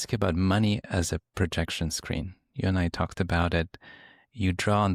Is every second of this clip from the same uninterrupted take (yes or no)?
yes